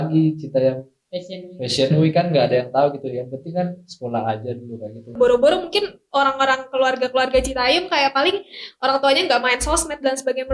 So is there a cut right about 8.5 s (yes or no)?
no